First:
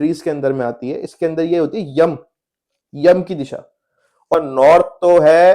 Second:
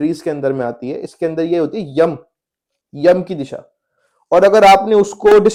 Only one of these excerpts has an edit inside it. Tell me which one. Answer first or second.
first